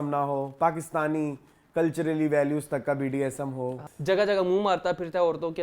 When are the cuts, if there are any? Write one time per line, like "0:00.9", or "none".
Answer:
0:03.8